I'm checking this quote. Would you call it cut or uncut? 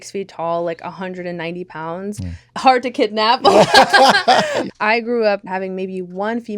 cut